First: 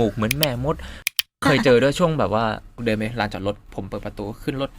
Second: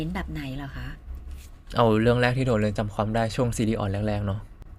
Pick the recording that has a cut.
first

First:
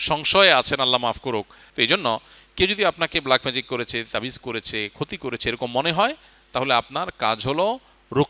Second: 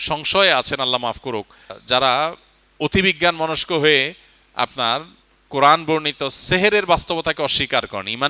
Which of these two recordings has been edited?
first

